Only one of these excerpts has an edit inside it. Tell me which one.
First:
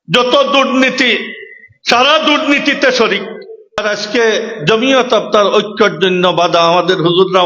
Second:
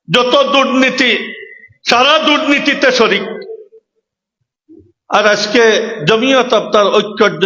first; 1 cut; at 3.8 s

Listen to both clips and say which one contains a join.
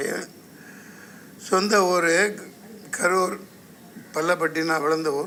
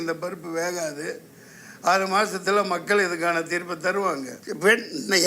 second; 1 cut; at 4.4 s

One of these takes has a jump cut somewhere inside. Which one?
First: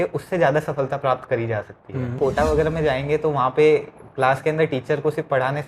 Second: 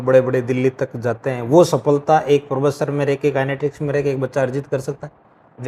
first; 1 cut; at 2.1 s

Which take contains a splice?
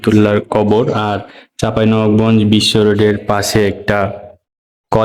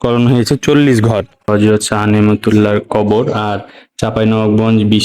second; 1 cut; at 1.5 s

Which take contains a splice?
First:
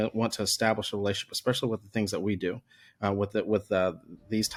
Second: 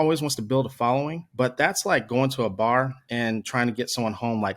second; 1 cut; at 1.2 s

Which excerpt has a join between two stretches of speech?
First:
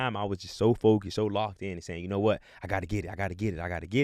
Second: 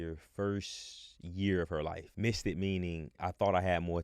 second; 2 cuts; at 2.1 s, 3.2 s

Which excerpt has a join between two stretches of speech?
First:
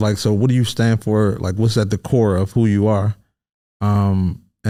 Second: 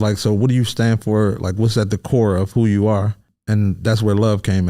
second; 1 cut; at 3.3 s

